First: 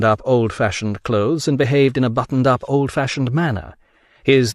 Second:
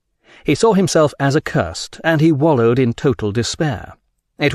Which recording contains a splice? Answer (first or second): first